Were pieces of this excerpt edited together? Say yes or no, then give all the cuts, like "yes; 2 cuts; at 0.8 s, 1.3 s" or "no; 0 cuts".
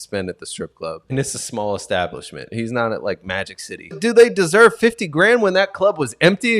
yes; 2 cuts; at 1.1 s, 4.0 s